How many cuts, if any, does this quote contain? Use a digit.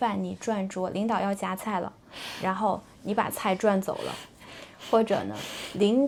0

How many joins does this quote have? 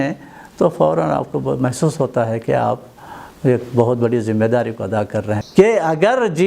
1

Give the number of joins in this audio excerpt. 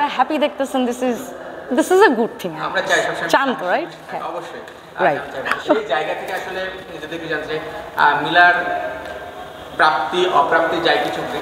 0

